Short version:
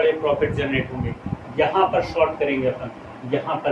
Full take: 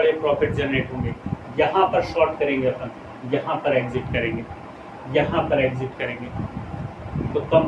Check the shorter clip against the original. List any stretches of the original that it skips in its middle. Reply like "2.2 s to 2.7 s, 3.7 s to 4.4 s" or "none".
none